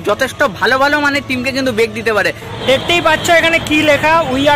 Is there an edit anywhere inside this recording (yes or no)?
yes